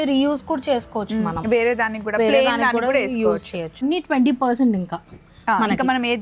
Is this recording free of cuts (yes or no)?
no